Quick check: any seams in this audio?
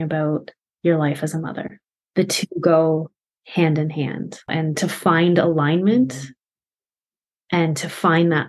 yes; 2 cuts; at 1.9 s, 4.5 s

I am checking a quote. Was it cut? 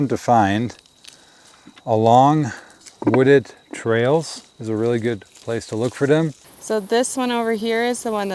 yes; 1 cut; at 6.5 s

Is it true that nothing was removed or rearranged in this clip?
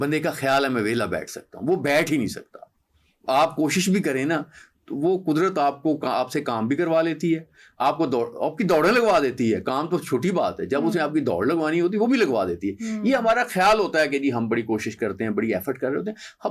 yes; 0 cuts

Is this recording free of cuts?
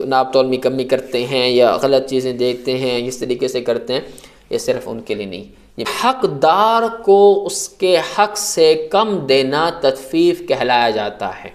no; 1 cut; at 5.9 s

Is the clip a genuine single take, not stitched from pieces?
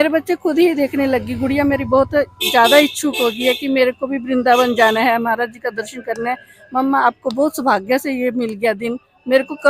yes; 0 cuts

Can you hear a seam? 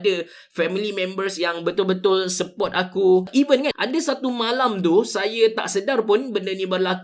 yes; 1 cut; at 3.5 s

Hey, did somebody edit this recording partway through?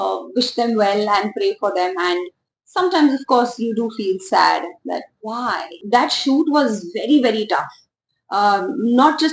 yes; 1 cut; at 5.8 s

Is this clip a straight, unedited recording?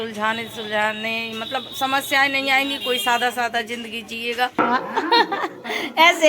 no; 1 cut; at 4.6 s

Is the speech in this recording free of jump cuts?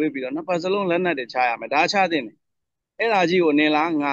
no; 1 cut; at 2.5 s

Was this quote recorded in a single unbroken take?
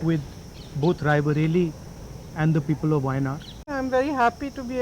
no; 1 cut; at 3.7 s

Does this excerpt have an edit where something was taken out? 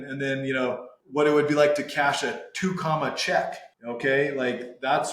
yes; 2 cuts; at 0.9 s, 3.7 s

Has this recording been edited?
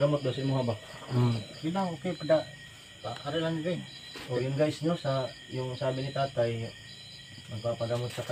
no; 0 cuts

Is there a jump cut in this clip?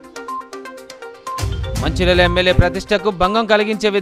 no; 0 cuts

